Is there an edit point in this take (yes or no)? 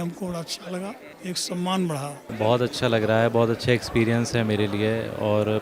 yes